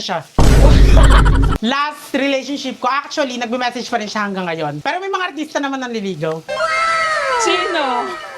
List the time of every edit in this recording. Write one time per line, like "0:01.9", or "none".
0:01.6
0:04.8